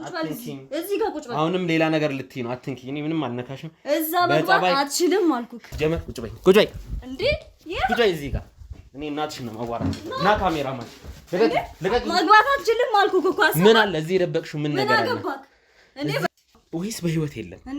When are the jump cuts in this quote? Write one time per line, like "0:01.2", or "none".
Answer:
0:05.6
0:16.3